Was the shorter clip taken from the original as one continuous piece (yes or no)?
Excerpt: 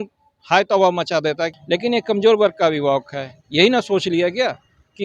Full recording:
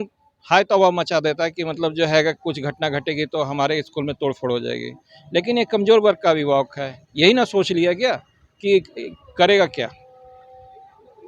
no